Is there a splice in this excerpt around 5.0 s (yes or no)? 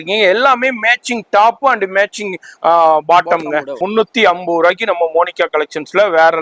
no